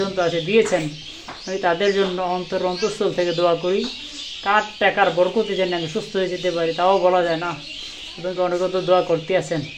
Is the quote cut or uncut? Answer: uncut